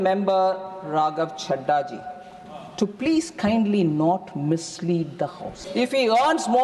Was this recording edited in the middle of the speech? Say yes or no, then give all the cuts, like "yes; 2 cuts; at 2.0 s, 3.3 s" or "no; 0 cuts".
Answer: yes; 1 cut; at 5.6 s